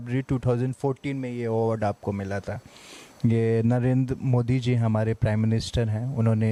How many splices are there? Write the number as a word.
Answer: zero